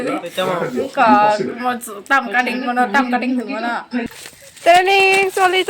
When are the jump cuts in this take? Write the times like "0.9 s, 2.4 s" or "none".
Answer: 4.0 s